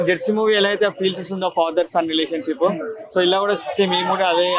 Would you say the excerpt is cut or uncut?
uncut